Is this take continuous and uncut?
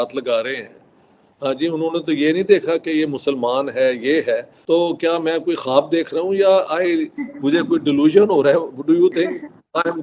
no; 1 cut; at 4.5 s

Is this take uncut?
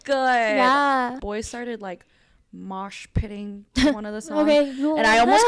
no; 1 cut; at 1.2 s

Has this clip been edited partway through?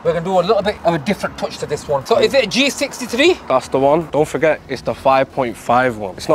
yes; 2 cuts; at 2.0 s, 4.1 s

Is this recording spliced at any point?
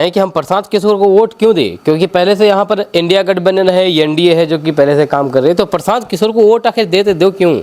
no; 0 cuts

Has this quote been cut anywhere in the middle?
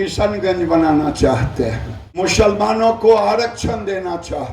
yes; 1 cut; at 2.2 s

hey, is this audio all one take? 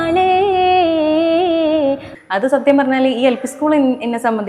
no; 1 cut; at 2.1 s

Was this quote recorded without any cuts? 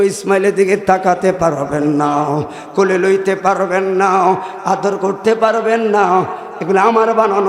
yes; 0 cuts

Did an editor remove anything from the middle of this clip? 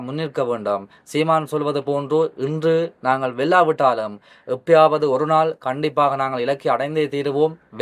no; 0 cuts

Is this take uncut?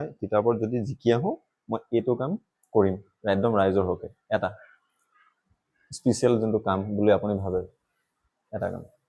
yes; 0 cuts

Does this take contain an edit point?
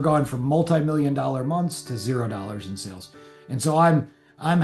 no; 0 cuts

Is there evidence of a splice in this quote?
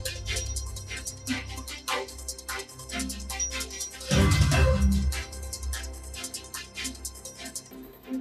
no; 0 cuts

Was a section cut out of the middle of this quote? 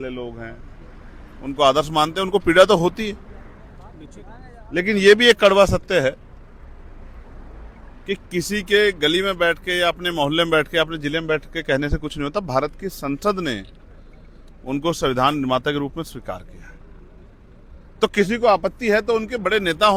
no; 0 cuts

